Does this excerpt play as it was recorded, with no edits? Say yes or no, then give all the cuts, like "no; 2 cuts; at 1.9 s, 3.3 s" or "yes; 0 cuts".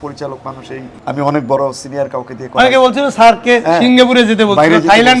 no; 1 cut; at 0.9 s